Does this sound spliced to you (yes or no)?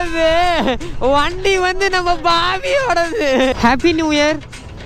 yes